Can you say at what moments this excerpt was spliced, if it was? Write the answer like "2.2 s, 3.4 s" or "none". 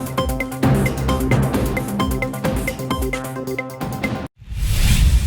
4.3 s